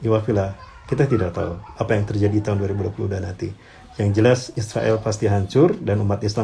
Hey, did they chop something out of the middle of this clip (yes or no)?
no